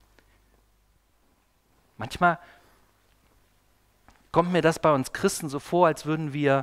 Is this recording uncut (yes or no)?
no